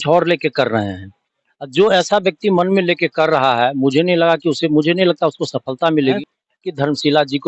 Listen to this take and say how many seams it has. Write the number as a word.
one